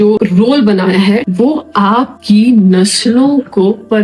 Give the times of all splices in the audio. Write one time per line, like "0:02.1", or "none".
0:01.3
0:02.2